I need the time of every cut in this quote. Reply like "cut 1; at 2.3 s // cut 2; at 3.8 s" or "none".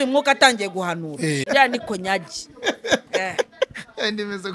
cut 1; at 1.4 s